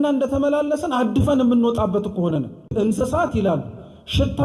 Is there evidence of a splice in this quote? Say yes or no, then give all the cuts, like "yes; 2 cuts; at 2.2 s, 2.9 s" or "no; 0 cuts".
yes; 1 cut; at 2.7 s